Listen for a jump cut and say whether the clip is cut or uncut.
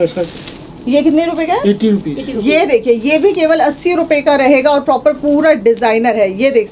uncut